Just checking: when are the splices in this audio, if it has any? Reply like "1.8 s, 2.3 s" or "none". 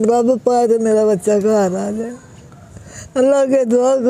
none